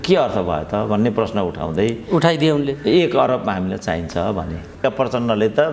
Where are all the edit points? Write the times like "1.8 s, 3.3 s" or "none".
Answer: 4.8 s